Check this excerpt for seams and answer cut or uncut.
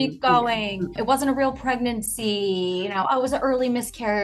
cut